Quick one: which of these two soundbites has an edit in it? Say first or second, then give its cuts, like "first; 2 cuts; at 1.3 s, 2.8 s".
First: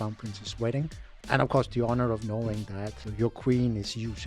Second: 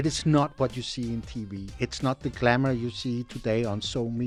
first; 2 cuts; at 1.1 s, 3.0 s